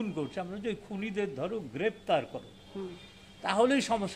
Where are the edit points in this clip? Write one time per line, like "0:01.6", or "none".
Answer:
none